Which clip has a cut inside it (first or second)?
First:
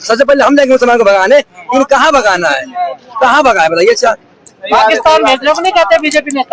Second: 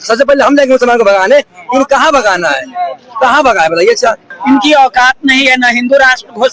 second